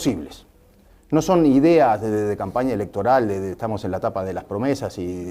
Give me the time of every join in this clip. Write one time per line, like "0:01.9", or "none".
0:02.5